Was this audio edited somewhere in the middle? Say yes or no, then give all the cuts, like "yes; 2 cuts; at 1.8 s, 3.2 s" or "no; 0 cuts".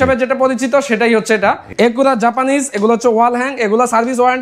yes; 1 cut; at 1.7 s